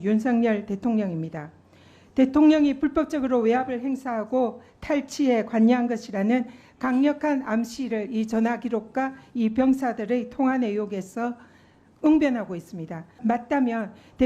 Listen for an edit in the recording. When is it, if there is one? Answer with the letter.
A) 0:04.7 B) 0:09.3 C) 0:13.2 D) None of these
C